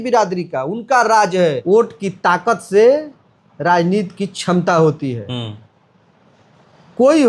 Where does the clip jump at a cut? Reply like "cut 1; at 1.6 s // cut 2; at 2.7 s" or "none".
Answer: cut 1; at 1.6 s